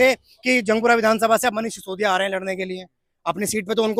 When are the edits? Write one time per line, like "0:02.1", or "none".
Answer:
none